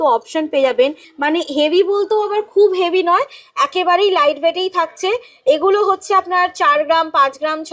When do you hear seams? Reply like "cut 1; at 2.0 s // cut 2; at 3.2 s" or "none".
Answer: cut 1; at 1.1 s